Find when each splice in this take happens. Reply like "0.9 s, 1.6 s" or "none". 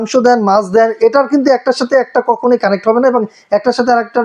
none